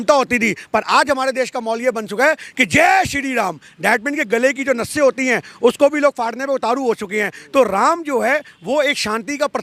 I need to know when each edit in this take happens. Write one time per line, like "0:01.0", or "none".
none